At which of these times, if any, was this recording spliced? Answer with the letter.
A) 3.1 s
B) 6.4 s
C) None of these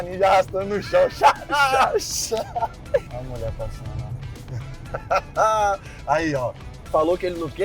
A